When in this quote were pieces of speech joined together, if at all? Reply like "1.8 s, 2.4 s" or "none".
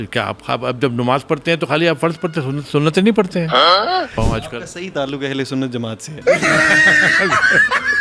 none